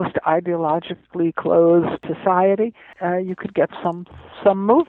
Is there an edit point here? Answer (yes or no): yes